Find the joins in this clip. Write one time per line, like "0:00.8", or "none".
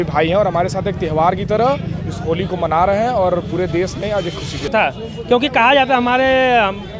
0:04.7